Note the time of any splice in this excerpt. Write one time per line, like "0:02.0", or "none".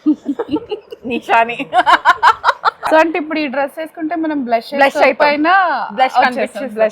0:02.8

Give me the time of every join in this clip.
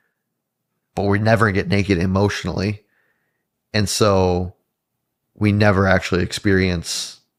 none

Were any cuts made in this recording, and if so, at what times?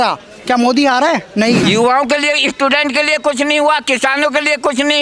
0:01.6

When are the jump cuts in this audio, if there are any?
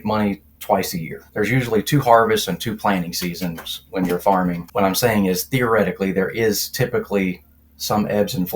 0:01.2
0:04.6

